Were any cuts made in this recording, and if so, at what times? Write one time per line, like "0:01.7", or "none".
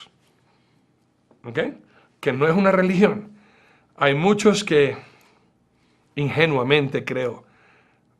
0:06.7